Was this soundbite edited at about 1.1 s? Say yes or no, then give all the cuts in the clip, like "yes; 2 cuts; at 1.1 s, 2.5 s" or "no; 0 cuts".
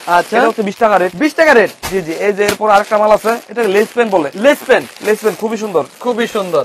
no; 0 cuts